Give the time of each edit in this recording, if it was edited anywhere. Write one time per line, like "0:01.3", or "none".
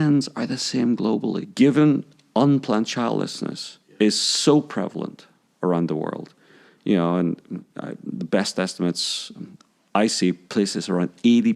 0:01.4

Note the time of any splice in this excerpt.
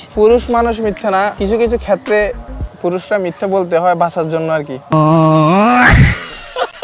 0:01.3

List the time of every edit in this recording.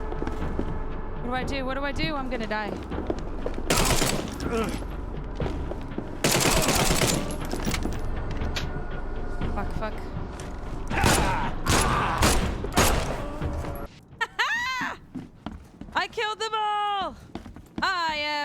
0:13.8
0:17.5

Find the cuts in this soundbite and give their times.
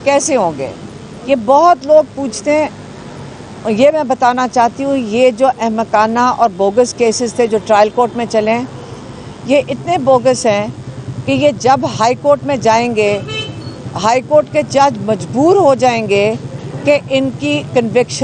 none

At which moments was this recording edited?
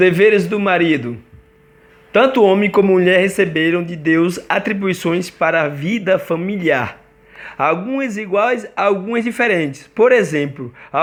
none

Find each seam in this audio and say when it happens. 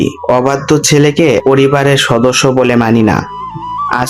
0:01.4

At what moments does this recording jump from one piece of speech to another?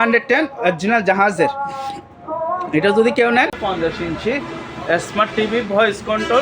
0:03.6

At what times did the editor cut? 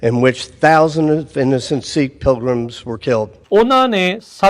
0:03.4

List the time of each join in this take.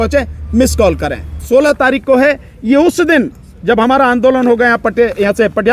0:01.4

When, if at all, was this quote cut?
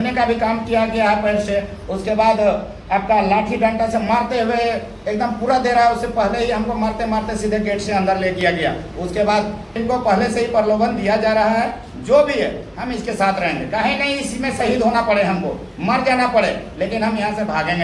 0:09.8

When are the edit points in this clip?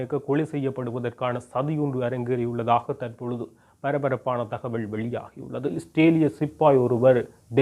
0:05.8

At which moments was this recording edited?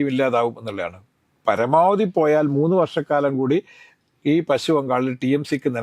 none

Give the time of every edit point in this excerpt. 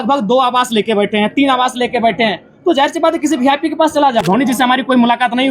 0:04.2

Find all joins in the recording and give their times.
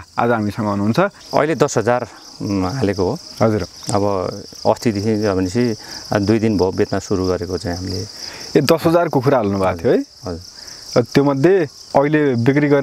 0:01.2
0:11.8

